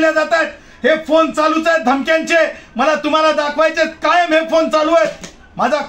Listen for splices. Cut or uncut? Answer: uncut